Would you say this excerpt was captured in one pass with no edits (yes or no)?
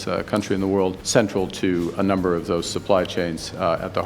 no